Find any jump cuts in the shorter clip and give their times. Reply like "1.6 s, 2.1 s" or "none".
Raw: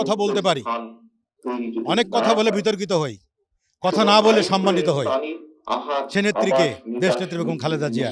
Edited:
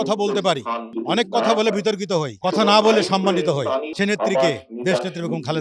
0.9 s, 2.3 s, 3.9 s